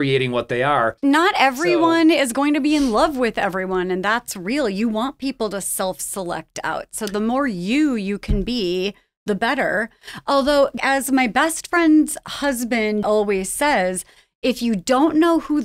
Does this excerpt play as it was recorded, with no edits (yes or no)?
no